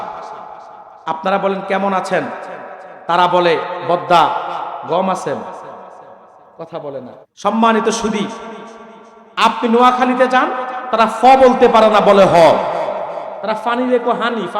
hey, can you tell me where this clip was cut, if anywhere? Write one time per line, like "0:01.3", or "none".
0:07.3